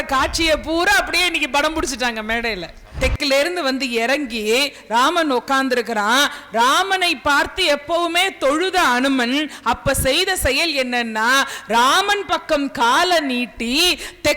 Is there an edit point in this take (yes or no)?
yes